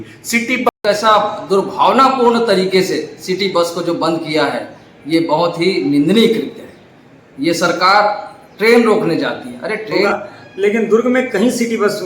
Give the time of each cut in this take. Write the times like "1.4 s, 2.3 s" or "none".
0.7 s, 10.1 s